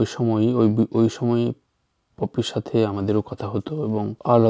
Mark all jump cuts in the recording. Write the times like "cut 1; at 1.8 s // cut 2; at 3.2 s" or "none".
none

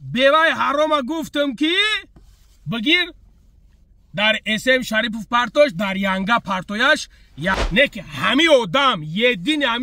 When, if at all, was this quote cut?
cut 1; at 7.6 s

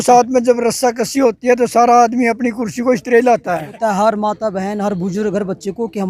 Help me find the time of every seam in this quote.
cut 1; at 3.7 s

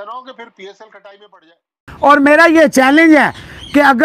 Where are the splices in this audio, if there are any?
cut 1; at 1.8 s

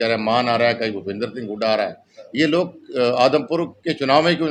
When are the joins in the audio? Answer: none

